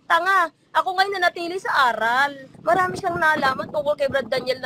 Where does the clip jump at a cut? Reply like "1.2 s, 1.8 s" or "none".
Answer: 2.5 s